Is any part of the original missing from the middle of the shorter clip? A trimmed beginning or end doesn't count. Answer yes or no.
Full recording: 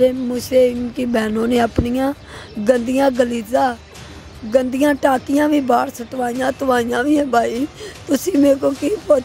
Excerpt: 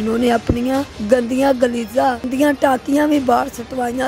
yes